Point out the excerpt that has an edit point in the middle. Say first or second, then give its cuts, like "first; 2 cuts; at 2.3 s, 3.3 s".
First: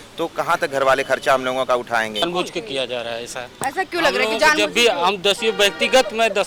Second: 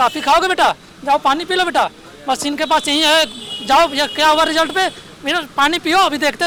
first; 1 cut; at 2.2 s